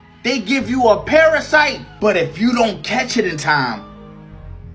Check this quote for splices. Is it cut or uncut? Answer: cut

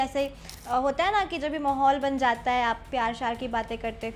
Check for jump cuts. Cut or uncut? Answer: uncut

